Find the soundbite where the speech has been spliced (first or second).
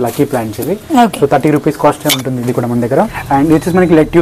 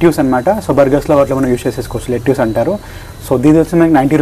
first